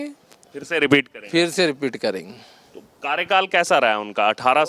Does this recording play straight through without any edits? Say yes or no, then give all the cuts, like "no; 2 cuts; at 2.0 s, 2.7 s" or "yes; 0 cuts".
yes; 0 cuts